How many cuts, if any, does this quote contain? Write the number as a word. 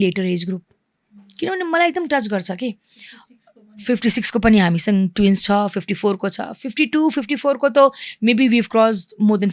zero